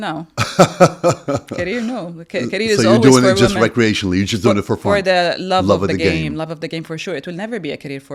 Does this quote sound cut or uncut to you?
uncut